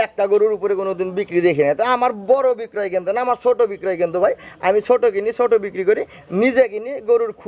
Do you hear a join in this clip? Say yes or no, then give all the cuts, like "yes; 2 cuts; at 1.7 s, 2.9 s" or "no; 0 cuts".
no; 0 cuts